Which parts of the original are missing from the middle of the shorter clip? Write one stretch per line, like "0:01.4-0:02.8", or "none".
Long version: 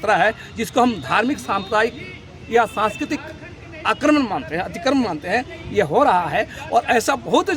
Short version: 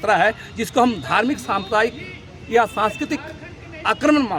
none